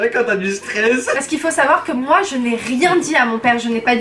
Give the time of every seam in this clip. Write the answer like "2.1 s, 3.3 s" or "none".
1.2 s